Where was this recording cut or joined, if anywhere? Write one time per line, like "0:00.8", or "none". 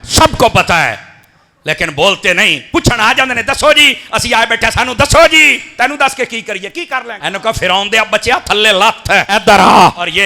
0:07.2